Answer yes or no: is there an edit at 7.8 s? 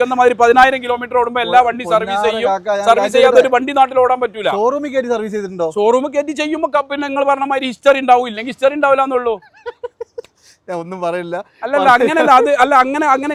no